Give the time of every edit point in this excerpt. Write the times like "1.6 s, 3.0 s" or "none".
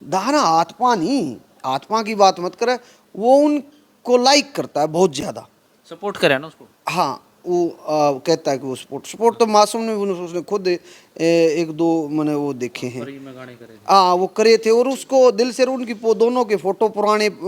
none